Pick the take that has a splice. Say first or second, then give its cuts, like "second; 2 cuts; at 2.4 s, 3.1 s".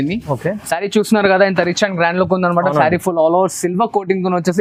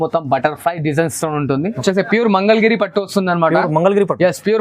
second; 1 cut; at 1.8 s